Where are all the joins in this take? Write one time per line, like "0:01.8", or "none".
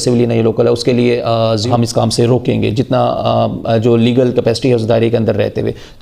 0:01.6